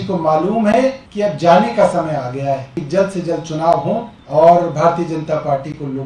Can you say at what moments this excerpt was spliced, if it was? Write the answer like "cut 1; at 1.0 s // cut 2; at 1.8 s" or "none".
cut 1; at 1.1 s // cut 2; at 2.8 s // cut 3; at 4.2 s

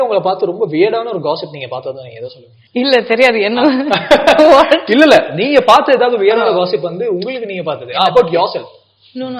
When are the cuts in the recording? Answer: none

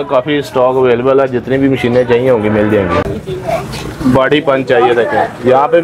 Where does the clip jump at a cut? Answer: cut 1; at 3.1 s

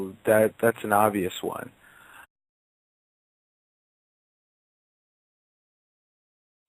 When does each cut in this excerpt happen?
none

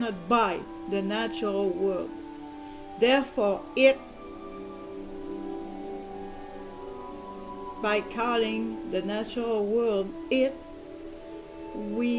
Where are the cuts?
none

